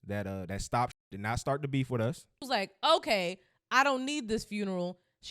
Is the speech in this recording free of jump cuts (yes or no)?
no